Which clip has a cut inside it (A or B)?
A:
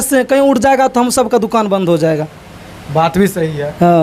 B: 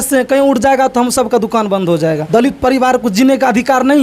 B